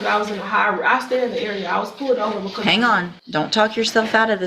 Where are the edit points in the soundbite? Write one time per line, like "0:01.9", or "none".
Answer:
0:03.2